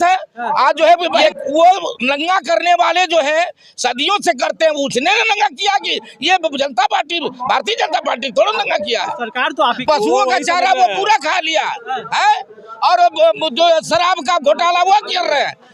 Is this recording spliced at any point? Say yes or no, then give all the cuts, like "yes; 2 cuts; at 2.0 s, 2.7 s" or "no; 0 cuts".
yes; 2 cuts; at 1.2 s, 9.8 s